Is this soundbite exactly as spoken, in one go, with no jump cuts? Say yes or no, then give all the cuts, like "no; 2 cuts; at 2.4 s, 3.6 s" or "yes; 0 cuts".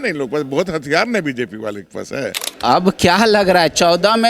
no; 1 cut; at 2.5 s